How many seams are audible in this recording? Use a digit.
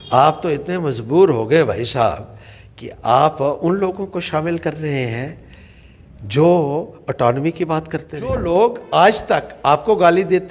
1